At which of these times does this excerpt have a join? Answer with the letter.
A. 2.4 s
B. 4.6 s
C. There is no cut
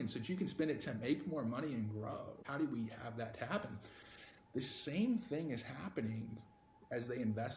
A